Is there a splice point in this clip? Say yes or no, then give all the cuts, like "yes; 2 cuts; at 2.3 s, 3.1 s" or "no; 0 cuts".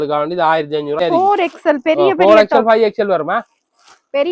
yes; 1 cut; at 1.0 s